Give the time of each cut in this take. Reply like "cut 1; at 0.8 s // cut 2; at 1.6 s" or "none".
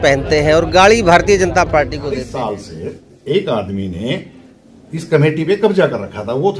cut 1; at 2.2 s